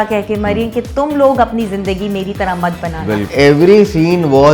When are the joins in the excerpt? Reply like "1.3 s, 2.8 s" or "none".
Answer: 3.3 s